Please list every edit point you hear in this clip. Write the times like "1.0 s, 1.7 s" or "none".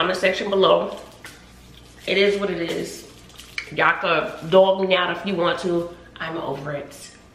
none

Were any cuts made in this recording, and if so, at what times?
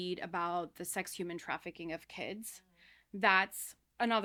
none

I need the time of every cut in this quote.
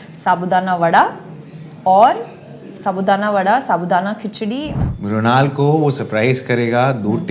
4.7 s

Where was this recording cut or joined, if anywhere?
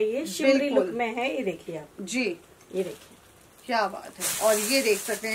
none

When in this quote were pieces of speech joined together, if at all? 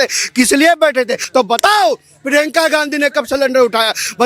1.2 s

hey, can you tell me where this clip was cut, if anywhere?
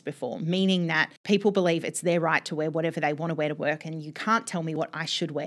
1.1 s, 4.8 s

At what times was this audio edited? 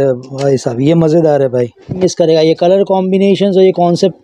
1.9 s

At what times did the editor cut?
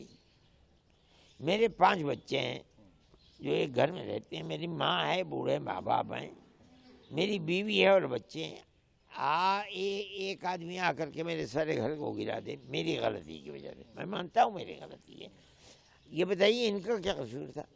none

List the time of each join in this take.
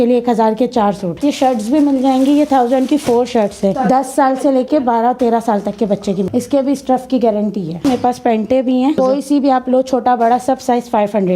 1.2 s, 3.8 s, 6.3 s, 7.8 s, 9.0 s

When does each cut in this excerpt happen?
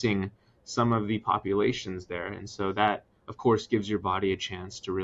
none

